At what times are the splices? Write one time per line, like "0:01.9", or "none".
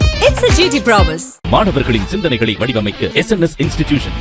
none